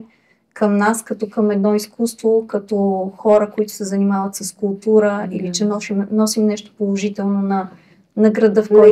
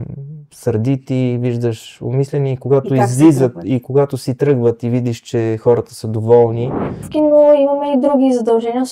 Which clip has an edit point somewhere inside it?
second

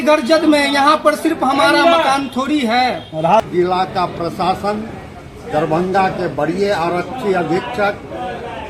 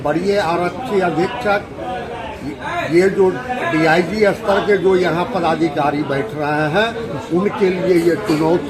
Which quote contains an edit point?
first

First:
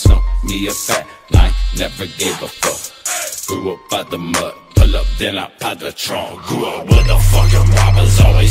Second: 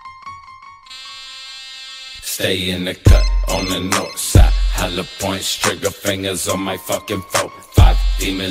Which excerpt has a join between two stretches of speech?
second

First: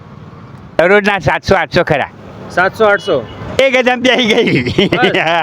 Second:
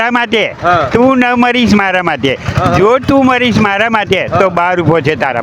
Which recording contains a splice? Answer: first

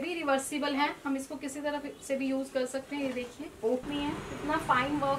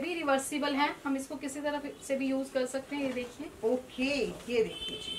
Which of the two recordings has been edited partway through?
first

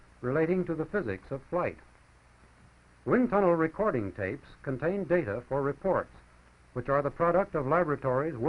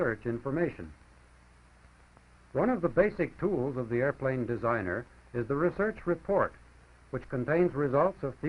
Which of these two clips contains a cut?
first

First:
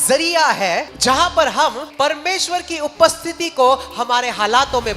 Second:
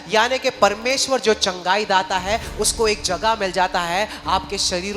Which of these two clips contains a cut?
first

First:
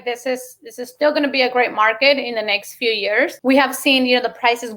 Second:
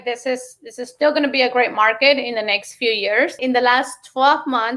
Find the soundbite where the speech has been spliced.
second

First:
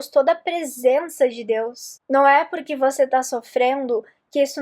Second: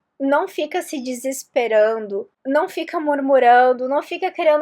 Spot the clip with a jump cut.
first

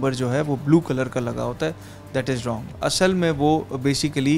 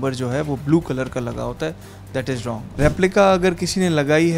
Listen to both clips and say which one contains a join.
second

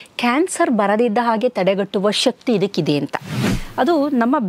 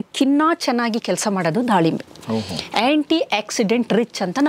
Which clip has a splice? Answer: first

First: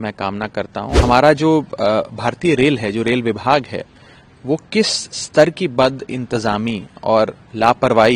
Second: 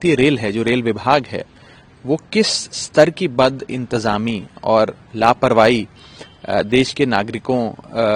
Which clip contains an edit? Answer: first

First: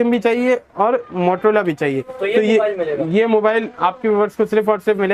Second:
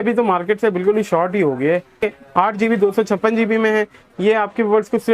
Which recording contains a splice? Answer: second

